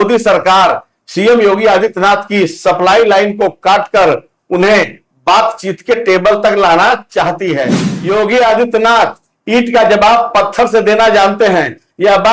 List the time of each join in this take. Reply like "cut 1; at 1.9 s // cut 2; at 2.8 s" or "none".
cut 1; at 7.9 s